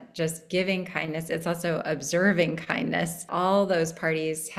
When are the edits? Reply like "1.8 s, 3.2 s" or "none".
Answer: 3.3 s